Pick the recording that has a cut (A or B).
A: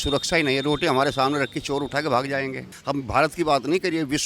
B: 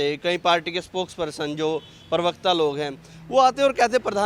A